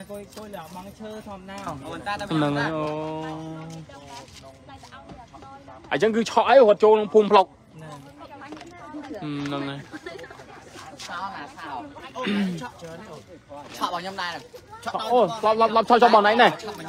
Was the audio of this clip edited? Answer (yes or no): no